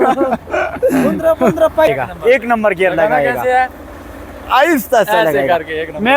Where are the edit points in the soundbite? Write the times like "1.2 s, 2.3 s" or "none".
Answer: 1.9 s